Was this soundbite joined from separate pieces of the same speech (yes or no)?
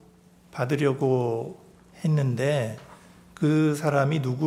no